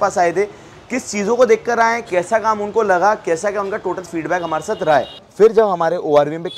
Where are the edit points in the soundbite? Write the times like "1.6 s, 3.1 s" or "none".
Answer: 5.2 s